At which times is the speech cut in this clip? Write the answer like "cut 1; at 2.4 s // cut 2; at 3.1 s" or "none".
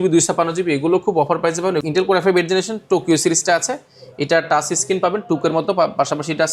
cut 1; at 1.8 s